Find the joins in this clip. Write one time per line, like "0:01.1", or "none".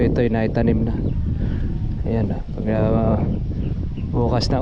none